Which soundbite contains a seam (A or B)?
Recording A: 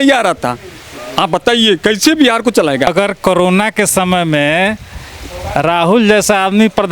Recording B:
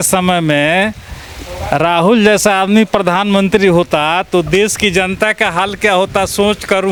A